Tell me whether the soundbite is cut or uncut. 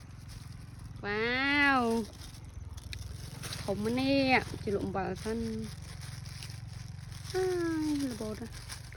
uncut